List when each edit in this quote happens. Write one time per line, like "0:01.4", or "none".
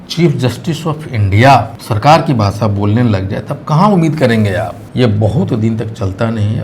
0:01.8
0:04.8